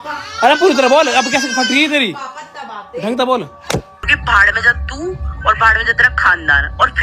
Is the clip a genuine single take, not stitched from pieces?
no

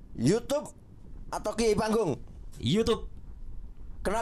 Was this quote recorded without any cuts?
yes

